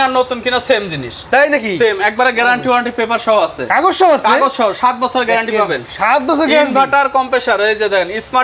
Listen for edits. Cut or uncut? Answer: uncut